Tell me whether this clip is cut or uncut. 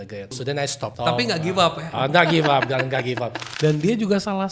cut